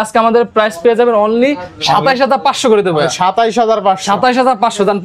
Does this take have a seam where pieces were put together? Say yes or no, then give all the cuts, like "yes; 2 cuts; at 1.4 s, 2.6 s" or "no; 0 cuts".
no; 0 cuts